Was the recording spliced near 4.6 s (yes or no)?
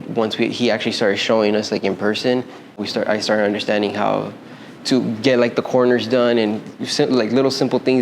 no